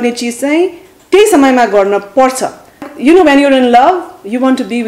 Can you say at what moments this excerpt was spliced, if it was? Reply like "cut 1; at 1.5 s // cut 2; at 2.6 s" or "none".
cut 1; at 2.9 s